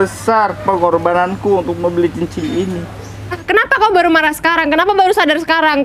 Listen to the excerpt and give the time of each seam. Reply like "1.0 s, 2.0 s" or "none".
3.4 s